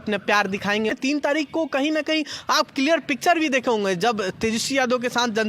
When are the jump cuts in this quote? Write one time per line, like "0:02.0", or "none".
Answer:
0:00.9